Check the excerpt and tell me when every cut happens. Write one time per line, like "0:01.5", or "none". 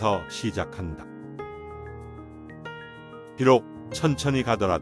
0:00.9
0:03.4